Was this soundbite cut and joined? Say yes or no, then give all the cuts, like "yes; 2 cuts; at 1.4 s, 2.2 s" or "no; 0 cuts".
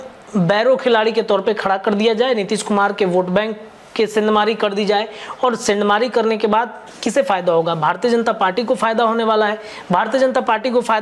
no; 0 cuts